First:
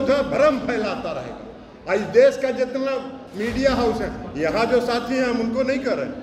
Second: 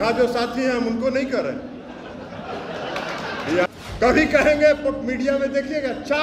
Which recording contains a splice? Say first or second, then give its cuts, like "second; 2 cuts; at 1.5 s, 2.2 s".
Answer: second; 1 cut; at 3.7 s